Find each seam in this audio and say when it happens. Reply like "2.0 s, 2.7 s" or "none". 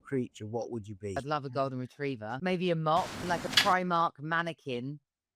1.2 s, 2.3 s, 3.5 s